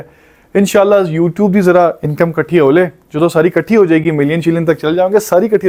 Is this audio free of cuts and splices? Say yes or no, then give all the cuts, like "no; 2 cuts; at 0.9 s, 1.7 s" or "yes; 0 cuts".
yes; 0 cuts